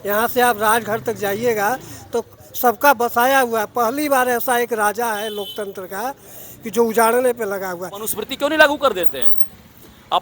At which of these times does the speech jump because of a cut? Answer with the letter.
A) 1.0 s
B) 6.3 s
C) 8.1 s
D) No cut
C